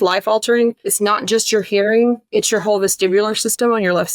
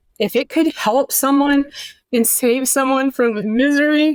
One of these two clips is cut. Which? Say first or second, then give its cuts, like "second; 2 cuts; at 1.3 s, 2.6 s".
first; 2 cuts; at 0.9 s, 2.2 s